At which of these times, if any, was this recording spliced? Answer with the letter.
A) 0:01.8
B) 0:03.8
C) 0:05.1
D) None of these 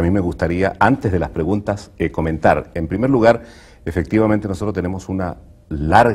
C